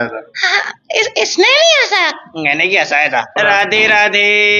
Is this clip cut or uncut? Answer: cut